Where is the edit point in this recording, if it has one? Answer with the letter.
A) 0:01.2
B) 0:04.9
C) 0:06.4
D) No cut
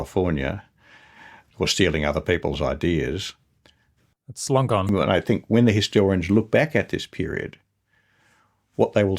B